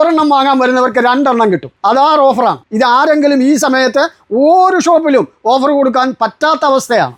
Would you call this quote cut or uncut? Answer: uncut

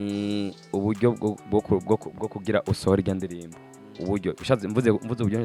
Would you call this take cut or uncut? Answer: uncut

